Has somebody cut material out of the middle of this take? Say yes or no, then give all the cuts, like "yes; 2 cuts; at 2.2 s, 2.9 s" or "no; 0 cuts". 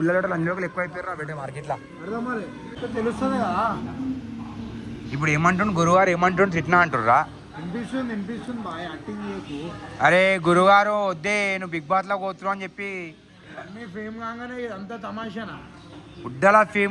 no; 0 cuts